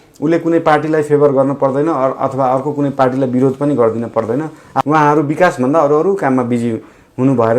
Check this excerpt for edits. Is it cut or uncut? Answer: cut